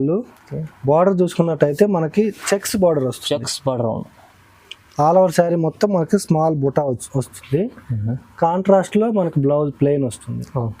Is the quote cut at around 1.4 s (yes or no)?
no